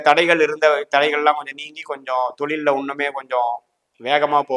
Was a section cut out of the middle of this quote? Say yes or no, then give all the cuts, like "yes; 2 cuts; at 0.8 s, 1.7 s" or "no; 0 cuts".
no; 0 cuts